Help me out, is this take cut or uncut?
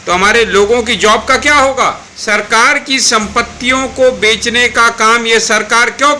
cut